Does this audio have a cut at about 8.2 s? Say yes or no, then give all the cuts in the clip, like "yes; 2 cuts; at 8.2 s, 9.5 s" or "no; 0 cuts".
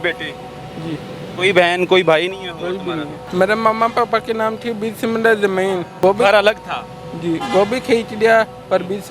no; 2 cuts; at 3.2 s, 5.9 s